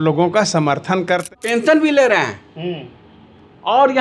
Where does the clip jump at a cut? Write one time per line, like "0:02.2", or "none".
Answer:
0:01.3